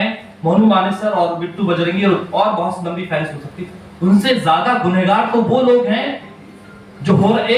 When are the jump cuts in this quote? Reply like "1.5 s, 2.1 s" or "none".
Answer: none